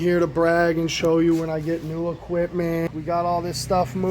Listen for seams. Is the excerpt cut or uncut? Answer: cut